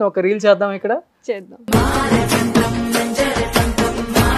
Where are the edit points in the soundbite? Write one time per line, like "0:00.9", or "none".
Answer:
none